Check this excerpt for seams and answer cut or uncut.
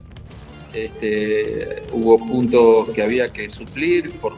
uncut